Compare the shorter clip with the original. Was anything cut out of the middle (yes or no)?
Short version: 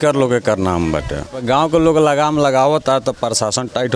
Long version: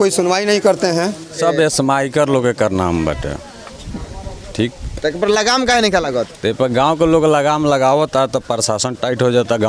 yes